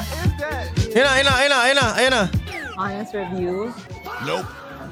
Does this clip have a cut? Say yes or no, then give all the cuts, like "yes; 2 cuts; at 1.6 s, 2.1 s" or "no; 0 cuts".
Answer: no; 0 cuts